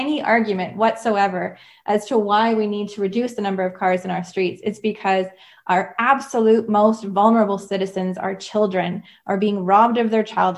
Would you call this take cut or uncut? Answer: uncut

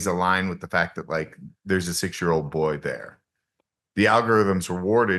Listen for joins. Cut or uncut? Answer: uncut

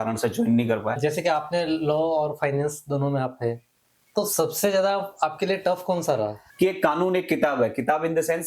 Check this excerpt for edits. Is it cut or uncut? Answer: cut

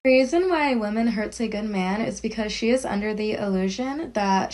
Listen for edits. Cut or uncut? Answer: uncut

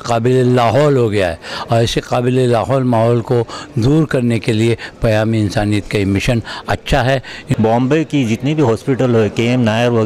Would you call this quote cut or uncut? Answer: cut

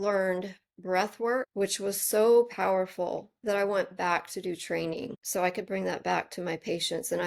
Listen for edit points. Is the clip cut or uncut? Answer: cut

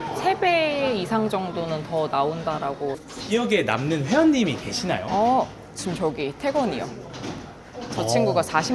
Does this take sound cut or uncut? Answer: cut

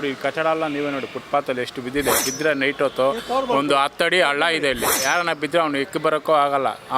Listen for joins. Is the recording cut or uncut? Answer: cut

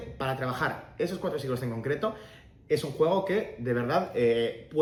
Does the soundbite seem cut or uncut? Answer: uncut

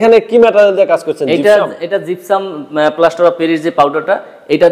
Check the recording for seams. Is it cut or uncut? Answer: uncut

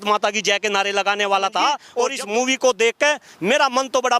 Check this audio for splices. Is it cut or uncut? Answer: cut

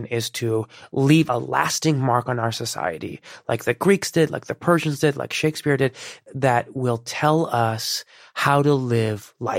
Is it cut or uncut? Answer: cut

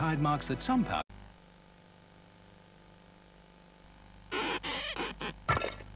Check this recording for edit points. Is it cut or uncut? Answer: uncut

